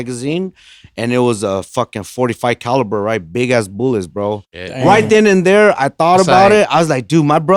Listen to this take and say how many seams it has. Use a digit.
0